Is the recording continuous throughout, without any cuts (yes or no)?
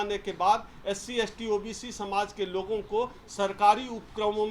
yes